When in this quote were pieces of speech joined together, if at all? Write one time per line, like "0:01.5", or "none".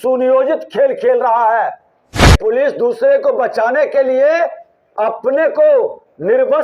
0:02.4